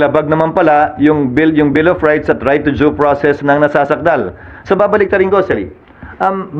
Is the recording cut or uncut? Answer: uncut